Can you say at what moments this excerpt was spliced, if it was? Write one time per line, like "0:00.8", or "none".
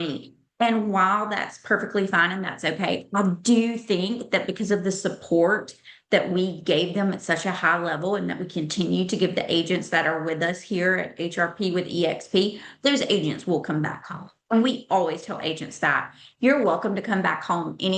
none